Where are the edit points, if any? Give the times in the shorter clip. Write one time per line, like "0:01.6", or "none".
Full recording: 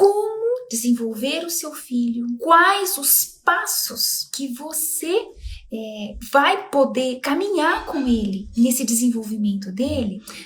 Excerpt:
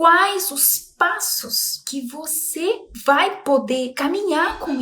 0:02.9